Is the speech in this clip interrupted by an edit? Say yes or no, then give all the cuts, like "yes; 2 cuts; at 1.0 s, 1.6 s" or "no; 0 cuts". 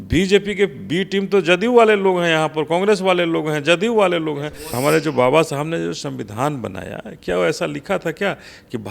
yes; 1 cut; at 4.7 s